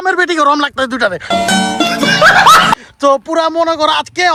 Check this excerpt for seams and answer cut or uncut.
uncut